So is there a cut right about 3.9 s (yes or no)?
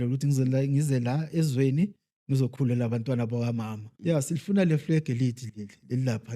yes